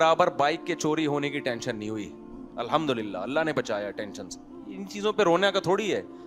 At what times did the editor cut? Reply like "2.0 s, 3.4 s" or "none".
none

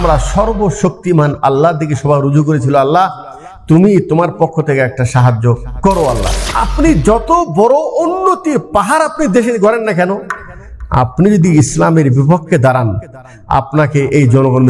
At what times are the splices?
6.6 s

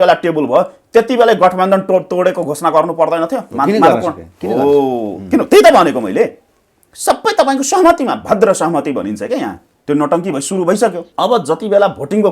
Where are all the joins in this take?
9.7 s, 11.0 s

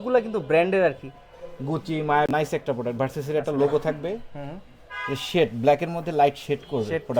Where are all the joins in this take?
none

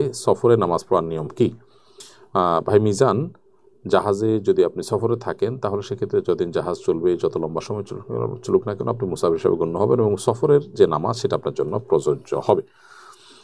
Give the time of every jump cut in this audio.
none

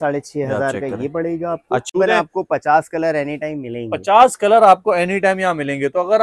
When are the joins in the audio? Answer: 2.0 s

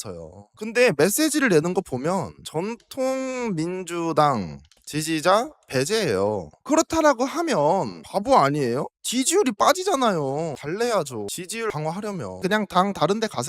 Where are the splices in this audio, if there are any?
6.5 s, 12.2 s

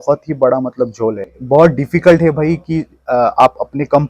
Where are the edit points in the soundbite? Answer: 1.3 s

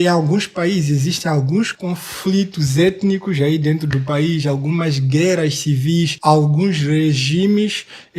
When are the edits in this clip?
6.2 s

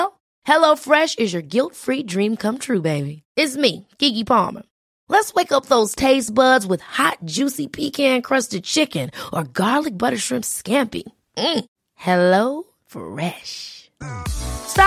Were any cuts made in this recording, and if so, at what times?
none

